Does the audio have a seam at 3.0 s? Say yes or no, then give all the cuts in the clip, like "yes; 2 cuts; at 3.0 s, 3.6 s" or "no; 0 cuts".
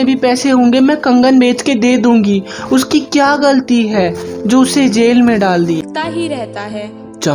no; 1 cut; at 5.8 s